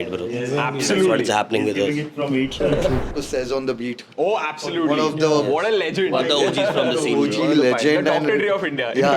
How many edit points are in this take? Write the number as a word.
one